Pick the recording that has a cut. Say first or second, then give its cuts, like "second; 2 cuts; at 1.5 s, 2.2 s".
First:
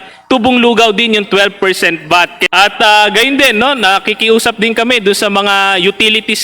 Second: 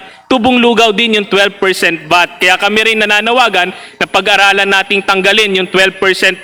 first; 1 cut; at 2.4 s